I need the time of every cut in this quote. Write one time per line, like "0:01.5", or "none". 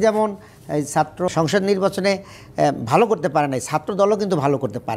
0:01.3